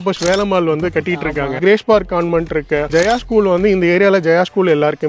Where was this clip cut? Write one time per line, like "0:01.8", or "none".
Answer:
0:01.6
0:02.9